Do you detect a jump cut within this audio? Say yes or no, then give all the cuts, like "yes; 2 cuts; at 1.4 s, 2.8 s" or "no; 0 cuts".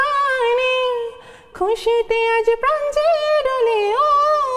no; 0 cuts